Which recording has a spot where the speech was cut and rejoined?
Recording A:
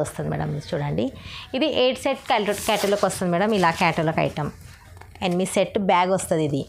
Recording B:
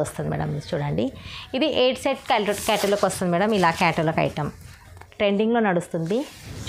B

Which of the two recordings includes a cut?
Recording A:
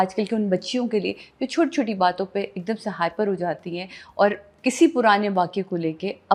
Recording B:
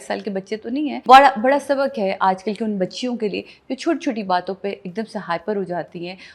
B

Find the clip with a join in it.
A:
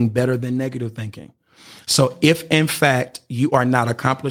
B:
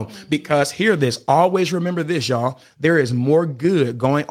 B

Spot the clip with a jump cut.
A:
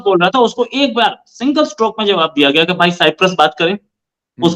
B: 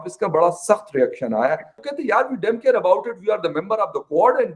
B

